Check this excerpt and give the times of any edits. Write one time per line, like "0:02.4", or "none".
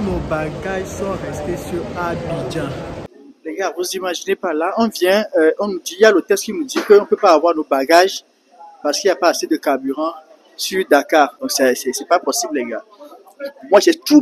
0:03.1
0:11.4